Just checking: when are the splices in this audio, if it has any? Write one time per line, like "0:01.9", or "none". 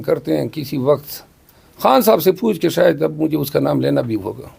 none